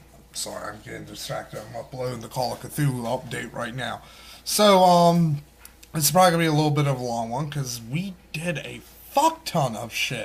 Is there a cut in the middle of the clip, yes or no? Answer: no